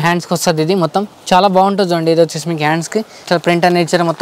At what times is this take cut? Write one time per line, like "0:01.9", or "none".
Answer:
0:03.2